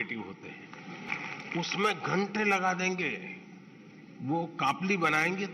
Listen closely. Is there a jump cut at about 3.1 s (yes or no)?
no